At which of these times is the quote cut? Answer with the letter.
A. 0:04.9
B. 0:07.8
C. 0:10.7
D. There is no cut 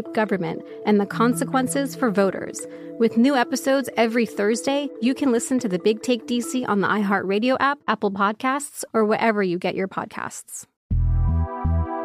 C